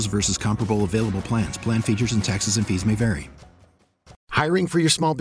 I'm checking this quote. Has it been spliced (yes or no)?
yes